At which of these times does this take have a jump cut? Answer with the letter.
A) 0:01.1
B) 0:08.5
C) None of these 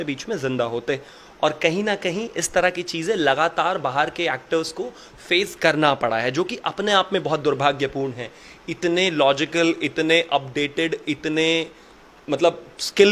C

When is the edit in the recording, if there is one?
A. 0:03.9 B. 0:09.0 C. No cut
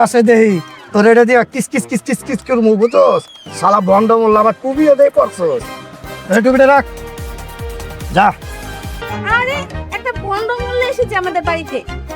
B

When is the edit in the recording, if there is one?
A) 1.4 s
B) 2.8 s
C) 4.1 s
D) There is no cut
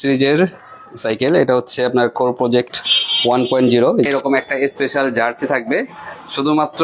C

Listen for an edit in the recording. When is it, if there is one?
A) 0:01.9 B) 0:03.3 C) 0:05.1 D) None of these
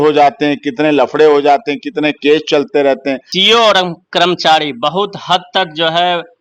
B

